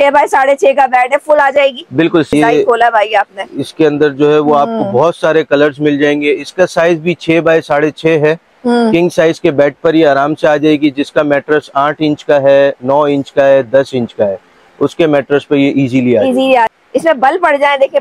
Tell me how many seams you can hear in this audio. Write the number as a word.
two